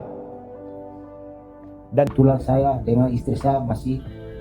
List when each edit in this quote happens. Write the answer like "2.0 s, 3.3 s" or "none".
2.1 s